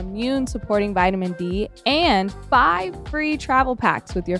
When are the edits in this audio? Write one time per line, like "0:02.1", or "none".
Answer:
0:02.4